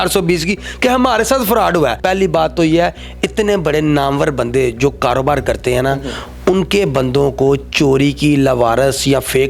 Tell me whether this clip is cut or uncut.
cut